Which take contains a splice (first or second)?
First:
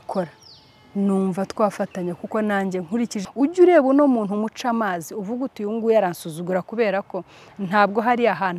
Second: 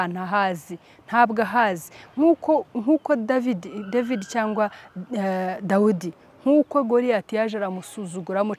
first